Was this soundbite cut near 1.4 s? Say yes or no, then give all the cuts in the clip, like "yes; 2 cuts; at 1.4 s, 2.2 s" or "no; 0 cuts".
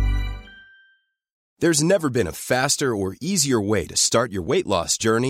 yes; 1 cut; at 1.4 s